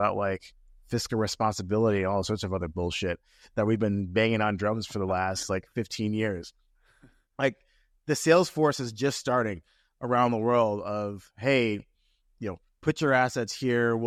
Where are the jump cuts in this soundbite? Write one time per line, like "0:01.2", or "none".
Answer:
none